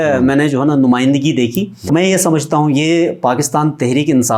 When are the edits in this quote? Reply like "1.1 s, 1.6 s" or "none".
1.8 s